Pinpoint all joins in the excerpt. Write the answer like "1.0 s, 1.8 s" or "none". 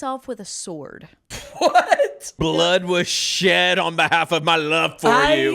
1.6 s, 2.3 s